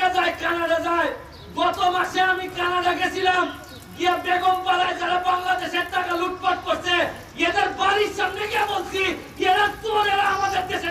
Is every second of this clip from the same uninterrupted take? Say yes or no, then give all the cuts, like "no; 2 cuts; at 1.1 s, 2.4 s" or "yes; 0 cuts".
yes; 0 cuts